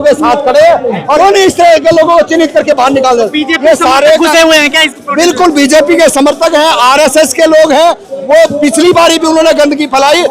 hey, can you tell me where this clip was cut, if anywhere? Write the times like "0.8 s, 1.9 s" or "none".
1.0 s